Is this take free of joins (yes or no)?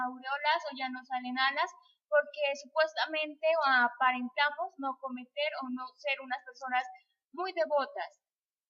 yes